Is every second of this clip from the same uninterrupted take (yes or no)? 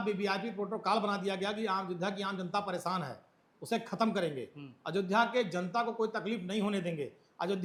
yes